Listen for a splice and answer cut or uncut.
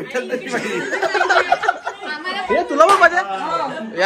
uncut